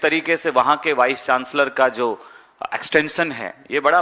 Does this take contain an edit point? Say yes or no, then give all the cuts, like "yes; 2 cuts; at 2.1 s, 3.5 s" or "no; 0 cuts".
no; 0 cuts